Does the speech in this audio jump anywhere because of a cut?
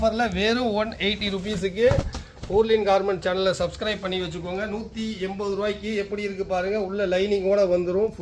no; 0 cuts

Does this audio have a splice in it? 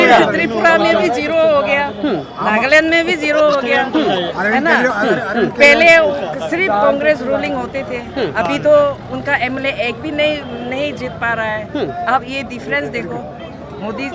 no; 0 cuts

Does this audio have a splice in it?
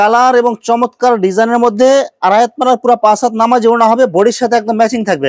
no; 0 cuts

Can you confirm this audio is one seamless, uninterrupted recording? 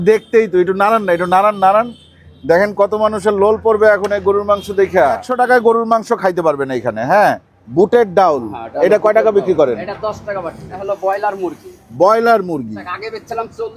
no; 4 cuts; at 5.3 s, 7.5 s, 10.7 s, 12.8 s

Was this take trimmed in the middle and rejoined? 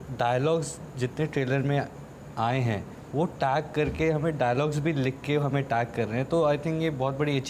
no; 0 cuts

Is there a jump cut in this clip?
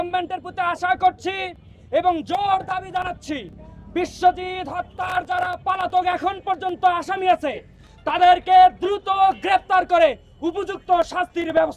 no; 0 cuts

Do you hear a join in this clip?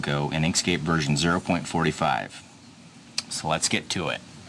no; 0 cuts

